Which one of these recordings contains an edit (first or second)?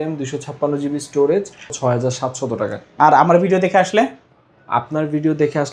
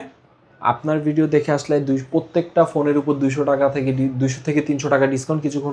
first